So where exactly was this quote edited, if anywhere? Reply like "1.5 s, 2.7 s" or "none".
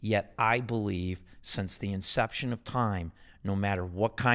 none